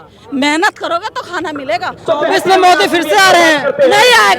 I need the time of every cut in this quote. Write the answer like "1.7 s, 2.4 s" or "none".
1.9 s